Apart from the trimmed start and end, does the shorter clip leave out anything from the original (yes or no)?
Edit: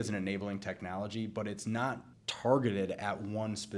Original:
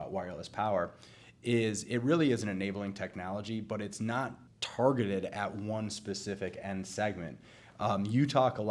no